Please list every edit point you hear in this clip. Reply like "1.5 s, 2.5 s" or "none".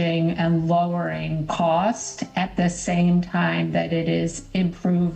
none